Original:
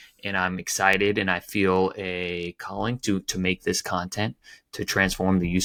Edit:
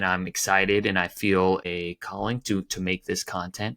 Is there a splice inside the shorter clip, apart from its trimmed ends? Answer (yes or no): yes